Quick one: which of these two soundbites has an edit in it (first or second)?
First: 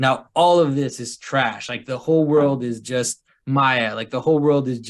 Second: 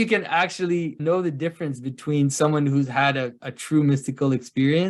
second